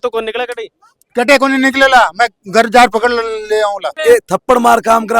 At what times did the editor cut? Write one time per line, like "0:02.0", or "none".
0:04.0

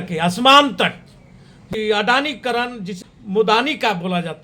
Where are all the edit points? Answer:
0:01.7
0:02.8

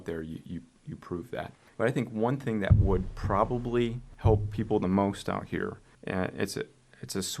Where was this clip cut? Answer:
0:01.6
0:04.1
0:05.9

